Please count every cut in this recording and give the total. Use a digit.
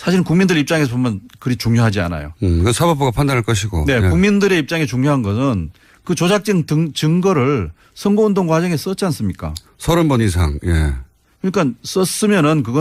1